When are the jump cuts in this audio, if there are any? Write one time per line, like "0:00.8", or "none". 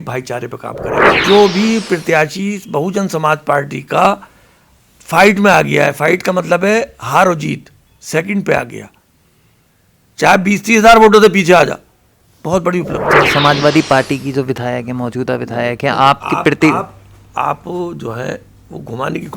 0:01.2
0:13.0